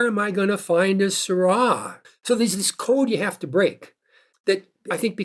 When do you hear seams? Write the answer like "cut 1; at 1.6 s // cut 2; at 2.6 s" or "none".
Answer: none